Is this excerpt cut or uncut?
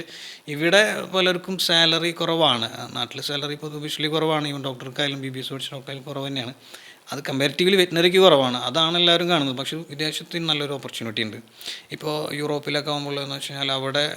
uncut